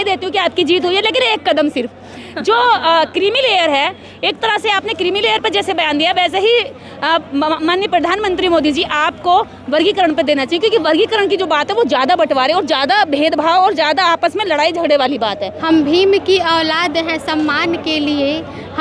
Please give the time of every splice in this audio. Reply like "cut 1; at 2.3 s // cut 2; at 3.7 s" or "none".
cut 1; at 15.5 s